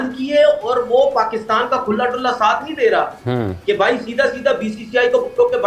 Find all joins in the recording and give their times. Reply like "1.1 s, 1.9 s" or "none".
none